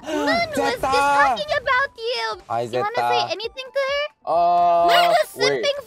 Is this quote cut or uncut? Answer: cut